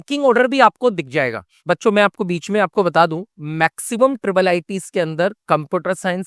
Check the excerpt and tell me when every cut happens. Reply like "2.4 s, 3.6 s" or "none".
1.6 s

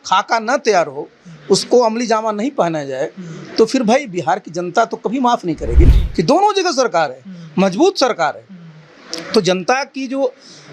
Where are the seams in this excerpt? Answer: 6.0 s

